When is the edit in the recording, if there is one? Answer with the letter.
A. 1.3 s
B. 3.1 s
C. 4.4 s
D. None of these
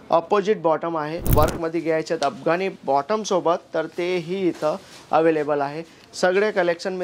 A